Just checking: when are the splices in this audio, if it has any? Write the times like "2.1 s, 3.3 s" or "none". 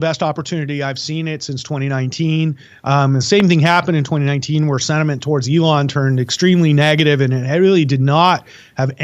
2.7 s